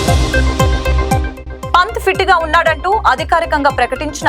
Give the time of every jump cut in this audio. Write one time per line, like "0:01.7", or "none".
none